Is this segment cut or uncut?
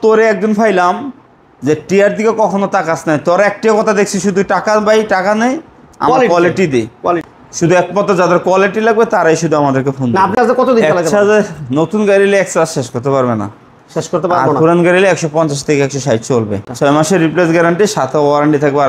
cut